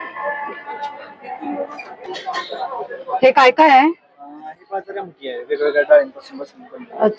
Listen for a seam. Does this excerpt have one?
yes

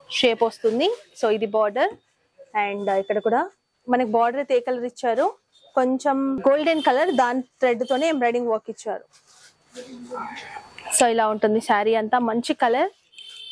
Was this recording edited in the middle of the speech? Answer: no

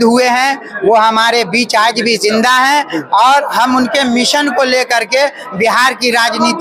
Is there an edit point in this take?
no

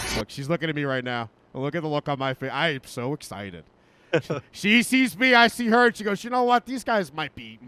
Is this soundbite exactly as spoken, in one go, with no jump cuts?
yes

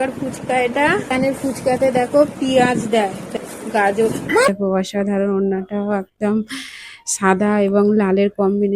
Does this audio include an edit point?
yes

